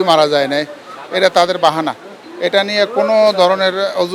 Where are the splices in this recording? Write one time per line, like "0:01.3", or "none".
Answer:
none